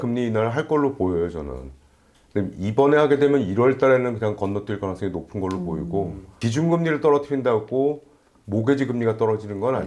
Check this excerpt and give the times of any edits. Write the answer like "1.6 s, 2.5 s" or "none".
6.4 s